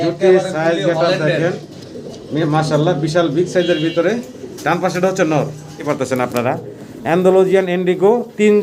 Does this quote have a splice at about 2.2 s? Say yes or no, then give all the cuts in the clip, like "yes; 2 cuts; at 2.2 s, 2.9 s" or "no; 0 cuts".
no; 1 cut; at 5.8 s